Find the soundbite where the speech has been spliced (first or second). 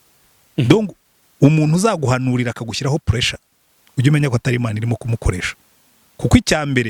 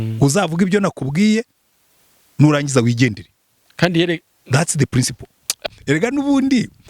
second